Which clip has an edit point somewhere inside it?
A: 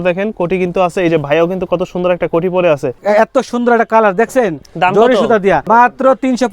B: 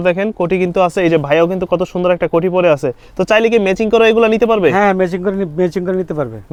A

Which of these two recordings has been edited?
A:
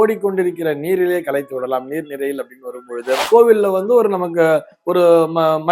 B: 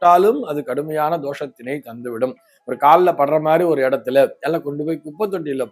A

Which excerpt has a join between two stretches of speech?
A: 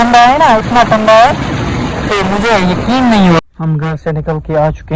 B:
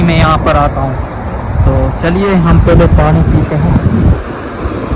A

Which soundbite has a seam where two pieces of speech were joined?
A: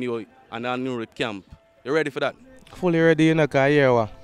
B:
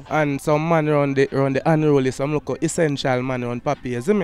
A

